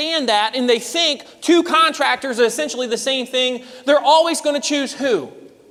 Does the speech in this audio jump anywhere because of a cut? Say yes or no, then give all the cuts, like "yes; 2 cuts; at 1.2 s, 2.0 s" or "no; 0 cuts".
no; 0 cuts